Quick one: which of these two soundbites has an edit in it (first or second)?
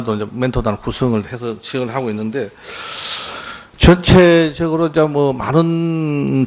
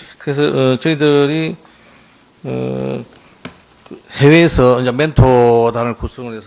second